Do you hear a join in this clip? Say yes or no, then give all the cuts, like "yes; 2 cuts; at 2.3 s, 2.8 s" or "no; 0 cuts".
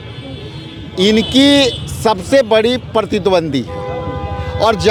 no; 0 cuts